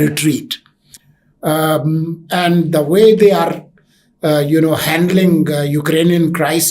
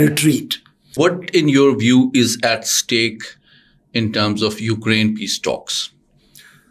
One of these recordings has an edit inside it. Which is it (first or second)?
second